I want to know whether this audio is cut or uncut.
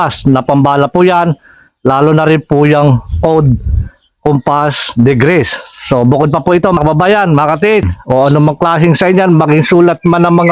cut